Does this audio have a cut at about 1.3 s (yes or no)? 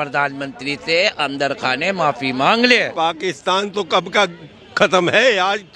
no